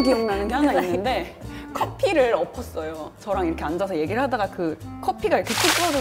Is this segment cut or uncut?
uncut